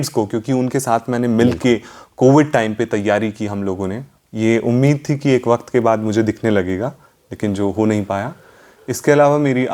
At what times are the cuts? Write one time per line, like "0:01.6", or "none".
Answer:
0:04.1